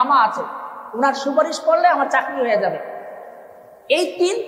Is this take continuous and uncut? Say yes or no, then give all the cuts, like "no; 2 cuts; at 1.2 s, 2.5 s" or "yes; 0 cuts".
yes; 0 cuts